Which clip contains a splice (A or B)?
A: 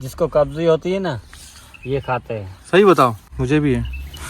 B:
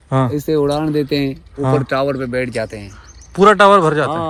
A